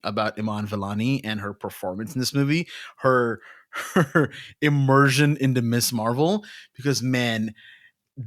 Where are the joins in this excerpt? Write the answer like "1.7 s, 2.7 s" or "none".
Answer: none